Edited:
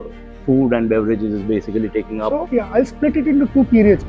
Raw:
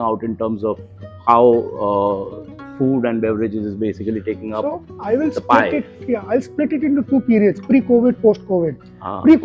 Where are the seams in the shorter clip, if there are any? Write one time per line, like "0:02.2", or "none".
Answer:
0:02.4